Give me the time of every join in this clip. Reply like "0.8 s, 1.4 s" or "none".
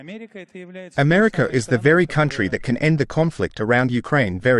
0.9 s